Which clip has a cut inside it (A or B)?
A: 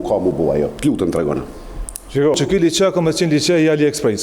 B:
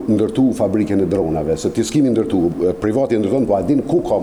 A